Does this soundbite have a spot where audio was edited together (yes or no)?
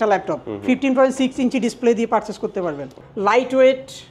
yes